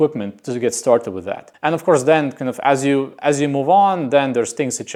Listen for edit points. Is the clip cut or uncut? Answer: uncut